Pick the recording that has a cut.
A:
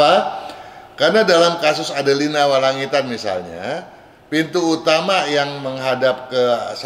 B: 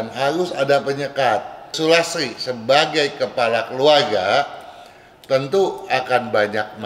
B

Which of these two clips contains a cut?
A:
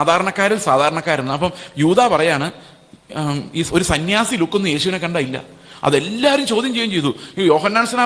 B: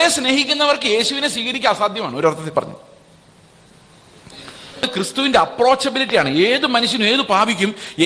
B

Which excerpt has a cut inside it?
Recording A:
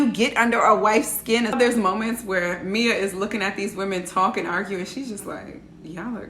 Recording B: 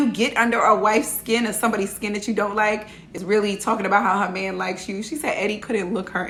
A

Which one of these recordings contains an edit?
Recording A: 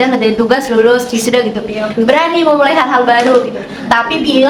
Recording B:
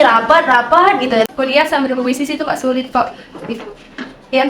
B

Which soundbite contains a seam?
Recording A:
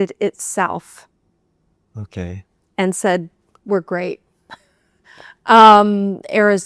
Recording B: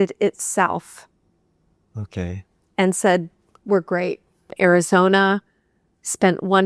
B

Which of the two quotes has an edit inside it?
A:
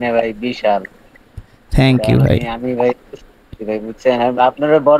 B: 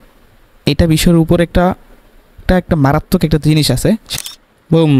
B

